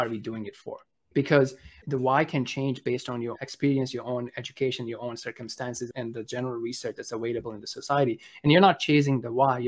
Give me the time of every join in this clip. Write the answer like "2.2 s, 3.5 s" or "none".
1.1 s, 1.7 s, 3.3 s, 5.9 s